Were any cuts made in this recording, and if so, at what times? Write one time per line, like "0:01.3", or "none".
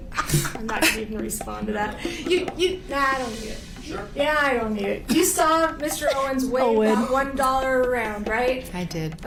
none